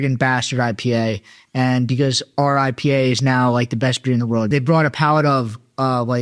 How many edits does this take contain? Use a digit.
1